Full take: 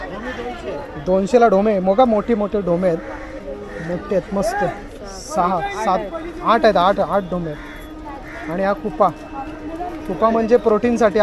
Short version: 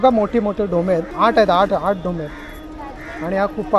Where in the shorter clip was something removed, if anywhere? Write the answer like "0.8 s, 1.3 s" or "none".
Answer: 1.1 s